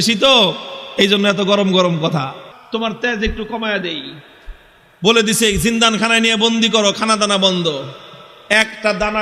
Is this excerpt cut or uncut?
cut